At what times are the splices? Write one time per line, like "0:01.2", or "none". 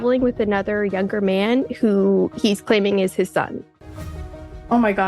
0:04.1

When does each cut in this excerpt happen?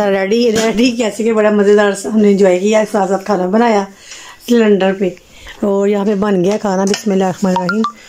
none

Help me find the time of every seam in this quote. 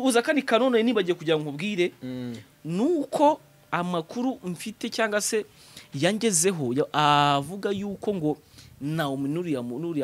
none

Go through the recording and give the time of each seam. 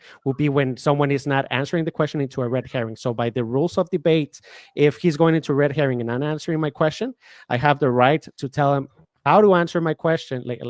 none

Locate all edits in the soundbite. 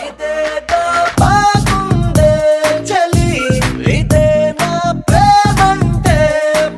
none

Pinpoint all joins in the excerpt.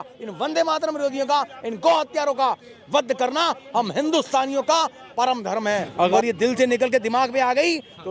0:05.9

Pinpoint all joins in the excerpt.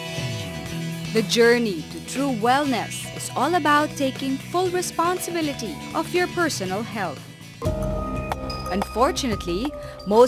none

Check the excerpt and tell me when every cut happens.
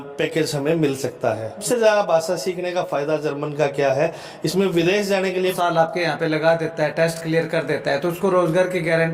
0:01.6
0:05.5

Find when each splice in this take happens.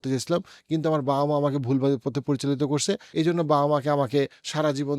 0:03.1

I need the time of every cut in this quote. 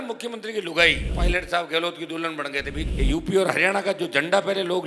0:01.1
0:02.8

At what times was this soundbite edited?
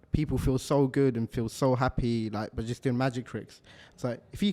none

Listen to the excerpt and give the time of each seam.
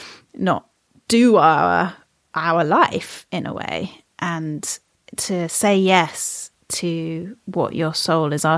0:05.0

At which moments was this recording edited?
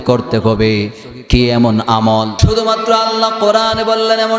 0:02.4

